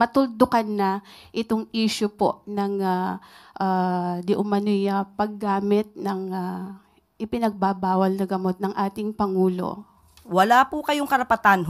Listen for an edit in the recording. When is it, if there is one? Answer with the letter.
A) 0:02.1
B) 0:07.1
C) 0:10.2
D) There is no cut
C